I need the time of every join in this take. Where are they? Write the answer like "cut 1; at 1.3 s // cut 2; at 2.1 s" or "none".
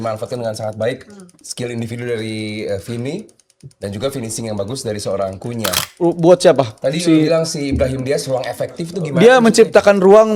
cut 1; at 1.3 s // cut 2; at 5.8 s